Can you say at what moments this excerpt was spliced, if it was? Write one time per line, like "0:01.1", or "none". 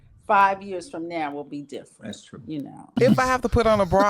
0:02.8

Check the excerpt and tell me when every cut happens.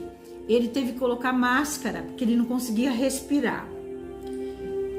none

